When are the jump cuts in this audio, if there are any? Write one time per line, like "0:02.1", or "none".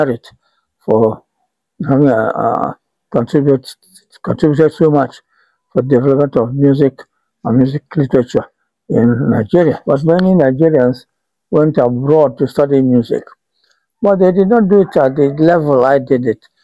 0:09.8